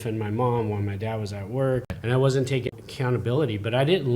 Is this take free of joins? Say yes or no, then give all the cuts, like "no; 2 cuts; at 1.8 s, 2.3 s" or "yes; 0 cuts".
no; 2 cuts; at 1.9 s, 2.7 s